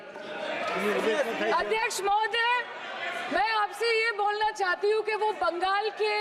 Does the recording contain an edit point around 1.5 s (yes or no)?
no